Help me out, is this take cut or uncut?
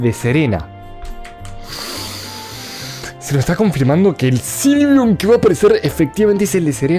uncut